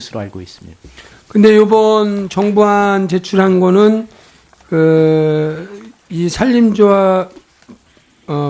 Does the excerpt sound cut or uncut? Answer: cut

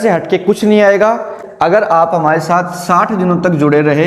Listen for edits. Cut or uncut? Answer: cut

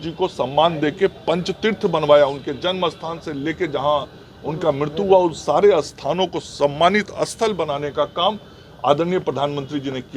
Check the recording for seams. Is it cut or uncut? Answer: uncut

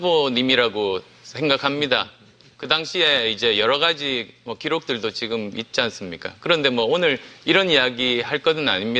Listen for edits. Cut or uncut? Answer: uncut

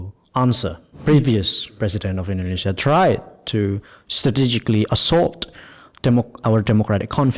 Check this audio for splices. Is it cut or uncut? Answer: cut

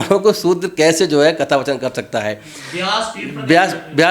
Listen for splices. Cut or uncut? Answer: uncut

